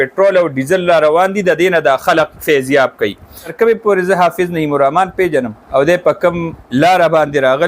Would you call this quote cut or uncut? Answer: cut